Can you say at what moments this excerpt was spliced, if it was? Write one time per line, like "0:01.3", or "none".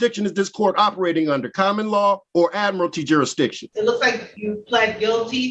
0:02.2
0:03.6
0:04.3